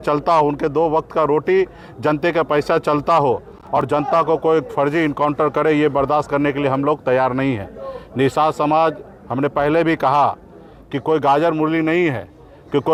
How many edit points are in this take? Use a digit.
0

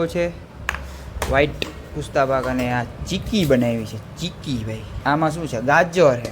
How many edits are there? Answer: 1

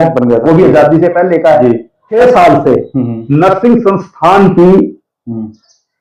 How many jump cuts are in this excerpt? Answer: 1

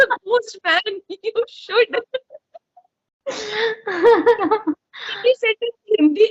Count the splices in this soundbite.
0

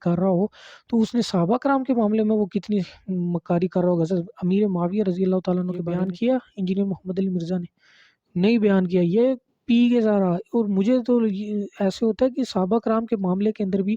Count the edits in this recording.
1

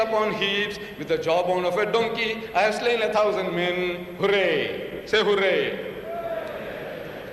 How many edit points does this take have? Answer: 1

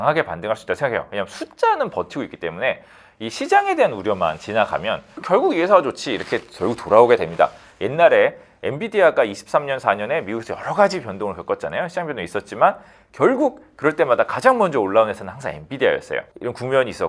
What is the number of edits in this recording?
0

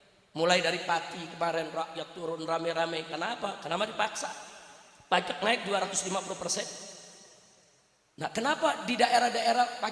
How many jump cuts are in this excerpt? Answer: 0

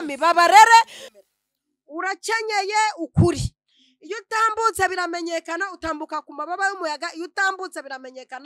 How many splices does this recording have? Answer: 1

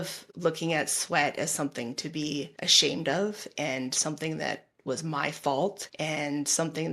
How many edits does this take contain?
0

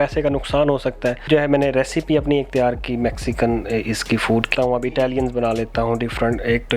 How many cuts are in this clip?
2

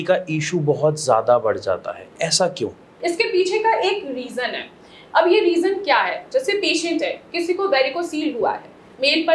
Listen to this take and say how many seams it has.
0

